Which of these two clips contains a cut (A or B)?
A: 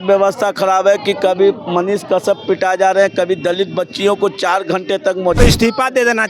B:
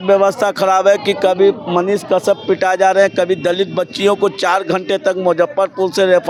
A